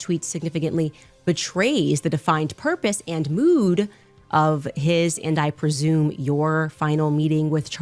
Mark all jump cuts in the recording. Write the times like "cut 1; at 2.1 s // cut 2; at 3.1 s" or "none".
none